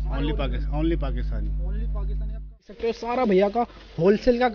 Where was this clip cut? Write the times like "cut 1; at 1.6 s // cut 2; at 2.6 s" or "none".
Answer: cut 1; at 2.7 s